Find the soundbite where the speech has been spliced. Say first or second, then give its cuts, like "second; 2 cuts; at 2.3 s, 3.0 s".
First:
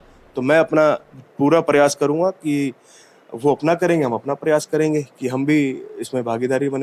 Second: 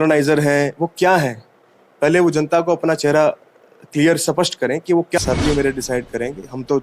second; 1 cut; at 5.2 s